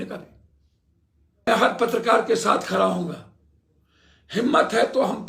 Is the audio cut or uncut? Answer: cut